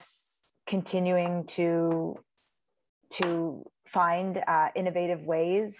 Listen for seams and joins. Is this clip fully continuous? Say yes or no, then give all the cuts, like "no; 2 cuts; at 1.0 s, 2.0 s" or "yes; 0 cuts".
yes; 0 cuts